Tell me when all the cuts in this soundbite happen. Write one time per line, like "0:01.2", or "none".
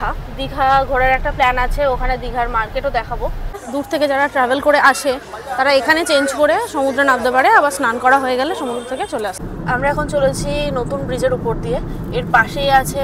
0:03.6
0:09.4